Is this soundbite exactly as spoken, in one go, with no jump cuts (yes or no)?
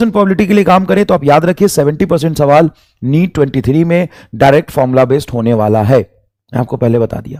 yes